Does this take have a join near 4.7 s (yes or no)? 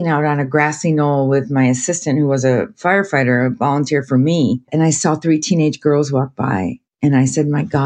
yes